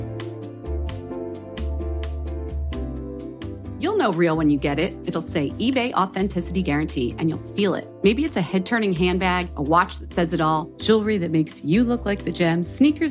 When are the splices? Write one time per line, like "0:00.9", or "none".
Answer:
0:02.2